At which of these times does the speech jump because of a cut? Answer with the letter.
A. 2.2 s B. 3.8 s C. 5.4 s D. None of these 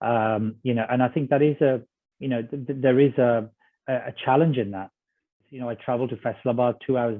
C